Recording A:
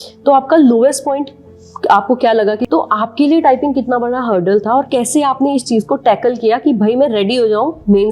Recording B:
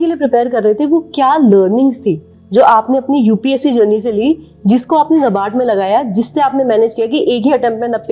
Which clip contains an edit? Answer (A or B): A